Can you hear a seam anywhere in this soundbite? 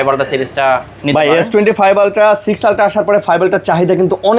no; 0 cuts

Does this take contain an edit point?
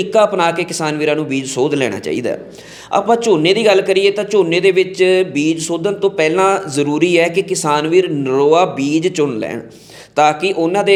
no; 0 cuts

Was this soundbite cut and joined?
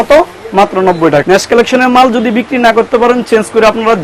yes; 1 cut; at 1.2 s

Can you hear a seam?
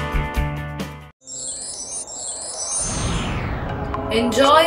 no; 0 cuts

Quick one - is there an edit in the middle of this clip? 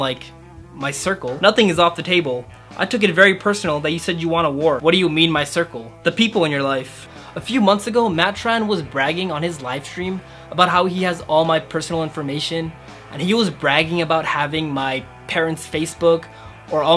yes; 2 cuts; at 4.8 s, 7.1 s

